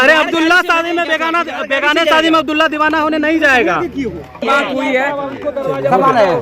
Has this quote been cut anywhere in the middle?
yes; 1 cut; at 4.4 s

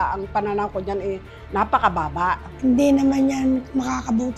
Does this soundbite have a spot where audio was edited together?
no; 0 cuts

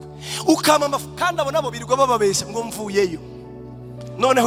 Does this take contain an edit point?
no; 0 cuts

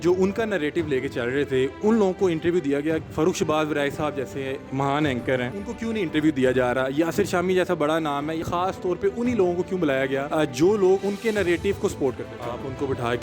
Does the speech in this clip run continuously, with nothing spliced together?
no; 7 cuts; at 3.1 s, 4.6 s, 5.5 s, 8.4 s, 10.3 s, 11.0 s, 12.3 s

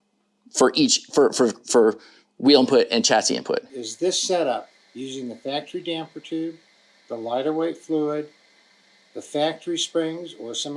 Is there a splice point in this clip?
yes; 1 cut; at 3.8 s

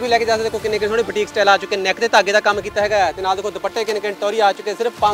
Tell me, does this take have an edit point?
no; 0 cuts

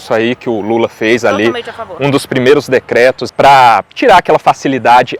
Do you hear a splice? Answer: no; 0 cuts

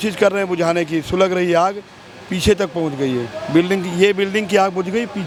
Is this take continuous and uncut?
yes; 0 cuts

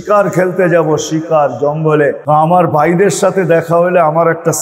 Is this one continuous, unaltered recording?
no; 1 cut; at 2.2 s

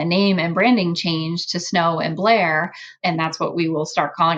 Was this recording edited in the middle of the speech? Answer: yes; 1 cut; at 2.9 s

